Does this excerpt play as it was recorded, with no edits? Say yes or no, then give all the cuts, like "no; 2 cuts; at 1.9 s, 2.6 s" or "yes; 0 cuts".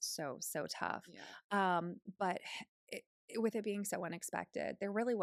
yes; 0 cuts